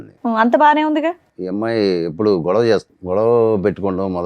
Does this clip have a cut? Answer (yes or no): yes